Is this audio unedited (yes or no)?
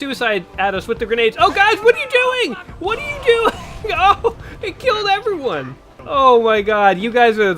no